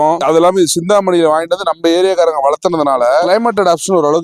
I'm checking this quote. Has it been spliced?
no; 0 cuts

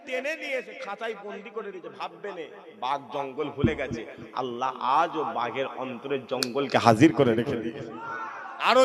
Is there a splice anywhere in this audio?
no; 0 cuts

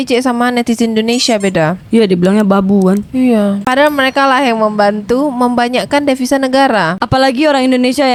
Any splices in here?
no; 0 cuts

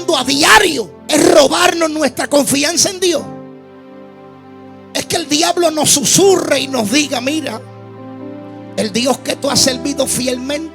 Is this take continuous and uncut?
no; 1 cut; at 0.9 s

